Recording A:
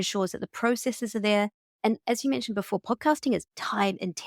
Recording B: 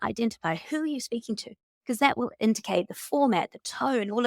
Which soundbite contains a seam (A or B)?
B